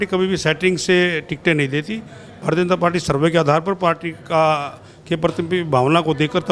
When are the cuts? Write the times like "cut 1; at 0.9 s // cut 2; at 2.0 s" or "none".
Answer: none